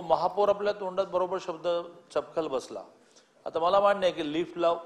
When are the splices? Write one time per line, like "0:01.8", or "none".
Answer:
none